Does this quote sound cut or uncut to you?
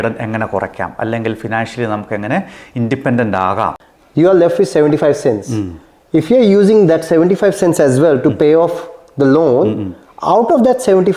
cut